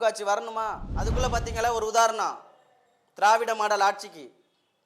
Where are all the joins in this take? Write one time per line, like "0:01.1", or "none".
0:00.9